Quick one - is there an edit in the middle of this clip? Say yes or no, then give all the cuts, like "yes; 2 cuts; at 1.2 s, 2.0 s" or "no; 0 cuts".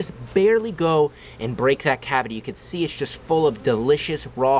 no; 0 cuts